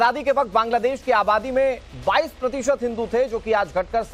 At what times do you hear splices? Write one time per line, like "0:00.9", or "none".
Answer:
none